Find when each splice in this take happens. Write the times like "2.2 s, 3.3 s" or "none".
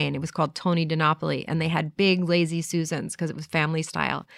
none